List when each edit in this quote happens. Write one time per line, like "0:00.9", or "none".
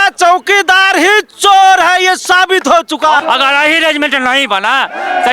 0:03.2